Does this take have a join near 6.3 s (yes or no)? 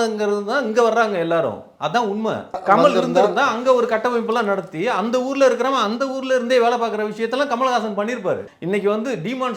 no